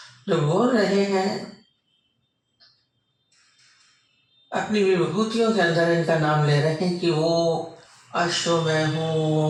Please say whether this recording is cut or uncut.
uncut